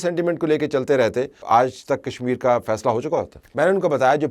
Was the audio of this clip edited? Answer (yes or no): yes